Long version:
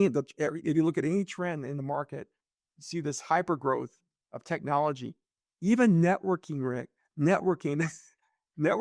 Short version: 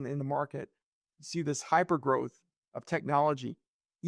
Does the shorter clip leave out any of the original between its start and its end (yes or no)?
no